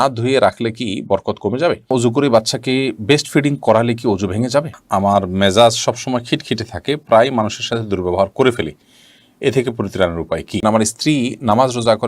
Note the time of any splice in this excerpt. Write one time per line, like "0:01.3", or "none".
0:01.9
0:04.8
0:10.6

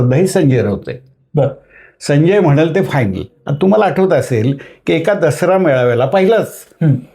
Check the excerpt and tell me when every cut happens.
none

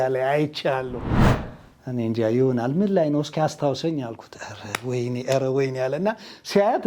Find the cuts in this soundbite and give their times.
none

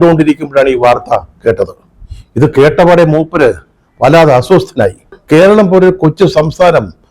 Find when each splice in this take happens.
0:05.2

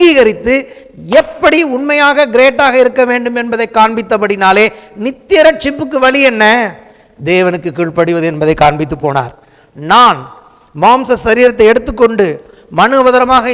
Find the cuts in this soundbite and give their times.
none

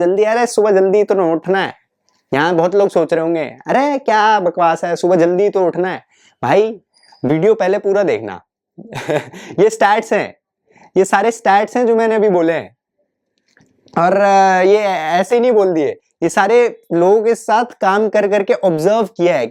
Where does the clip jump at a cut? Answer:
none

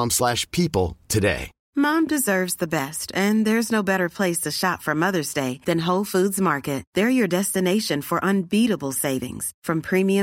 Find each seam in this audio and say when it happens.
0:01.5

